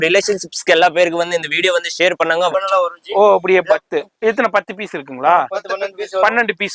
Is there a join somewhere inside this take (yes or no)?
yes